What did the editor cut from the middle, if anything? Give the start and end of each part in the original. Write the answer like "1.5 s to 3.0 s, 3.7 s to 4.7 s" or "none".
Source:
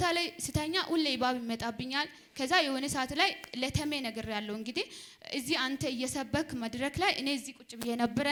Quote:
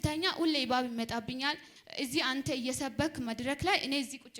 2.2 s to 5.0 s